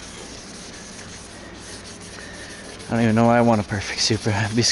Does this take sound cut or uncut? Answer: uncut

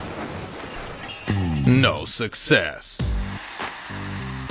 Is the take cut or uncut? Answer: cut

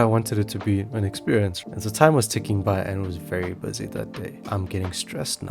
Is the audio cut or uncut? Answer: cut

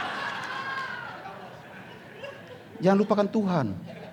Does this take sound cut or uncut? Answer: uncut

